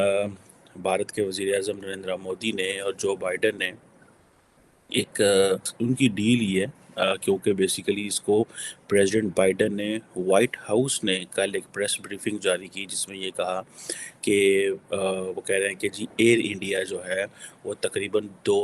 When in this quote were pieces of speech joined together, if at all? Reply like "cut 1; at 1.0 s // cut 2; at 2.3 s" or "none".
cut 1; at 5.7 s